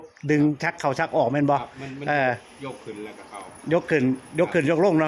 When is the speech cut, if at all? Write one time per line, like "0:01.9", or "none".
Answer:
none